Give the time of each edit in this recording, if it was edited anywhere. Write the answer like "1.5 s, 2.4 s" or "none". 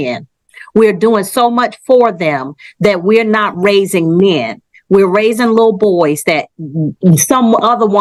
none